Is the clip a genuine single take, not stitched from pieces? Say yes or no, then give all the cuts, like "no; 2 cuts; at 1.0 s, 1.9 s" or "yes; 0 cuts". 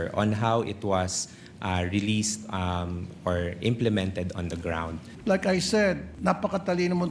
no; 2 cuts; at 5.1 s, 6.1 s